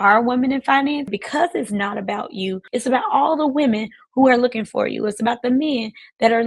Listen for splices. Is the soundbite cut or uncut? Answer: cut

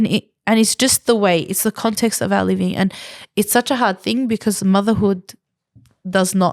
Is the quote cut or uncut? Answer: uncut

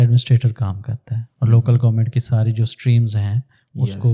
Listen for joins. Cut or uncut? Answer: uncut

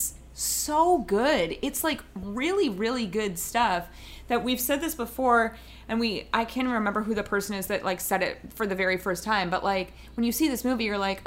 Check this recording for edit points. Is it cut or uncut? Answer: uncut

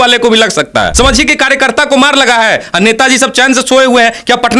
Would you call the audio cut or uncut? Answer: cut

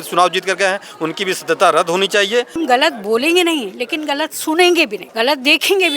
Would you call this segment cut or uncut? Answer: cut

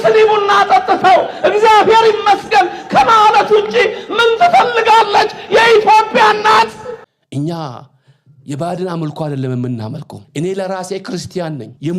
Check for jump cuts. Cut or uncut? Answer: cut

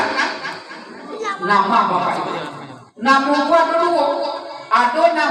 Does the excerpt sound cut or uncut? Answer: uncut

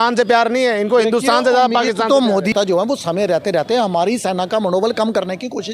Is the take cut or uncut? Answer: cut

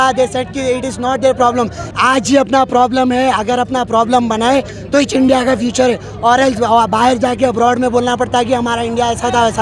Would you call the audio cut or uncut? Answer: cut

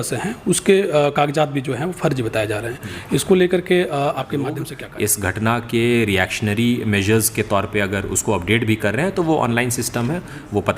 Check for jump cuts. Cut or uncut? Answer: cut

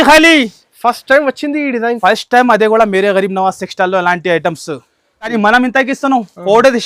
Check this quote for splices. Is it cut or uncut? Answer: cut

